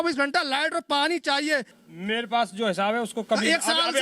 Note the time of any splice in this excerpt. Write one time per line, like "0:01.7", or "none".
0:01.8